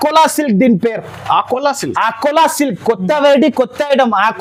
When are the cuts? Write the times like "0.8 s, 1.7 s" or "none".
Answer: none